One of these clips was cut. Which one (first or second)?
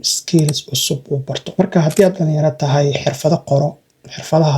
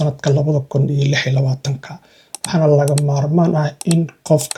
first